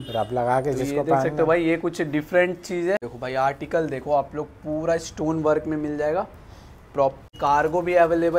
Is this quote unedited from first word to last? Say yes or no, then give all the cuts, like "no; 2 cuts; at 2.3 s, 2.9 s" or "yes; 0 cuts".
no; 2 cuts; at 3.1 s, 7.3 s